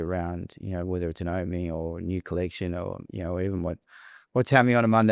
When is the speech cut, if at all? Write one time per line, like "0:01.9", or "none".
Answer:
none